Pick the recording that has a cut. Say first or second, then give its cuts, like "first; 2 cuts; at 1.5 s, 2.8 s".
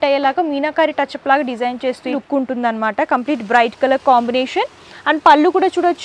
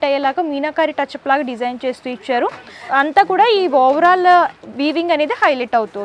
first; 1 cut; at 2.2 s